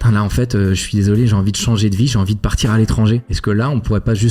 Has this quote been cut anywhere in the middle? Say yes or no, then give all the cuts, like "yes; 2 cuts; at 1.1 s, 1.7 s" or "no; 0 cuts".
yes; 1 cut; at 3.3 s